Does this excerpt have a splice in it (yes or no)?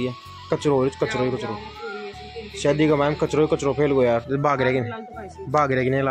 yes